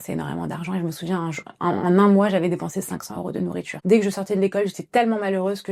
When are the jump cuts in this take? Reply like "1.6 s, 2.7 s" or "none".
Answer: 3.7 s